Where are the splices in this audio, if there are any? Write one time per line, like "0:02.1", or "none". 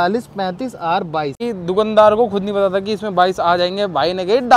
0:01.4